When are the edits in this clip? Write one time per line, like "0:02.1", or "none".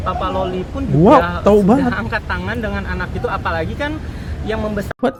none